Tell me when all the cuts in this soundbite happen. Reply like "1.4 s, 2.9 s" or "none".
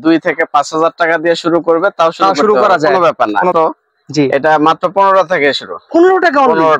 3.5 s

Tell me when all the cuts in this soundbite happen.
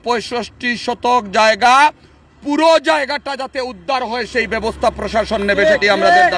none

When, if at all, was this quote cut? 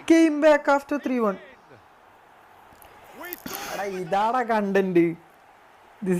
3.8 s

